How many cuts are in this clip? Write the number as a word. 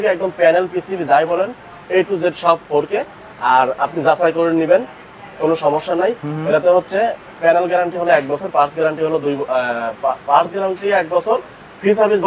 zero